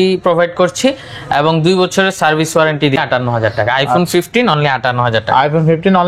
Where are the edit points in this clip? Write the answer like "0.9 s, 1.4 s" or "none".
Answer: 3.0 s